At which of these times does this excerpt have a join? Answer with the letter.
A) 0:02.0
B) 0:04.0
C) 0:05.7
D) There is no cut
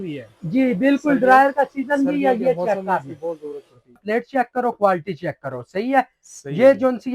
B